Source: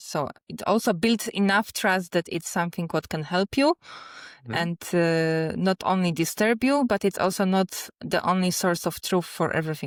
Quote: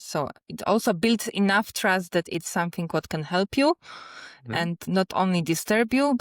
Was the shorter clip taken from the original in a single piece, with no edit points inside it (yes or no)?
no